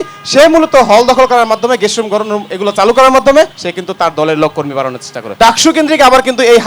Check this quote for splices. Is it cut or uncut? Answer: cut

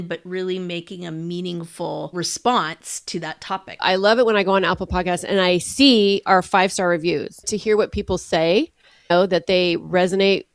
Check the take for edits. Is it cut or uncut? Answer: cut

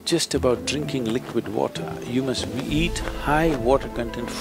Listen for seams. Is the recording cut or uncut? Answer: uncut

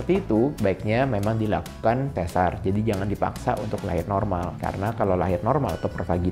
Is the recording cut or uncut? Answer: uncut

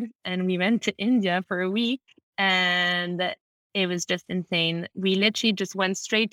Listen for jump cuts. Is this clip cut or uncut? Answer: uncut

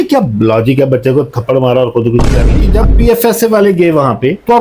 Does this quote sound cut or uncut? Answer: cut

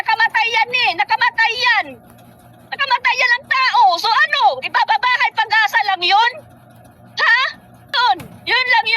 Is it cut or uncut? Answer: cut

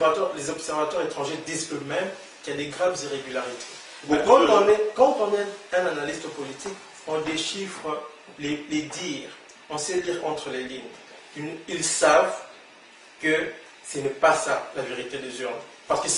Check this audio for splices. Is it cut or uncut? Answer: uncut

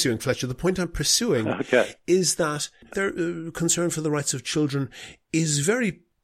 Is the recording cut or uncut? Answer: cut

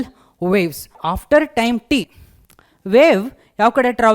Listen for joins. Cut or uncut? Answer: cut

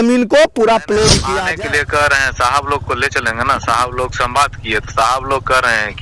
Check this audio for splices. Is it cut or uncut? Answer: cut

